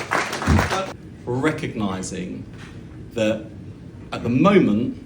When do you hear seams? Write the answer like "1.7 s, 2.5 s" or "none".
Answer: 0.9 s